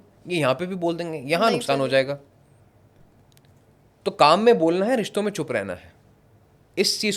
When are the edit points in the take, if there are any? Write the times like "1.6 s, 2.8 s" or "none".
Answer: none